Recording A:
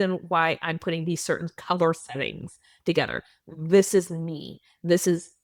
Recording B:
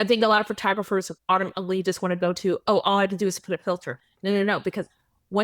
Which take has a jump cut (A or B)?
B